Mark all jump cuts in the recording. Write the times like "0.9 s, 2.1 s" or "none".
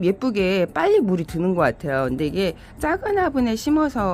none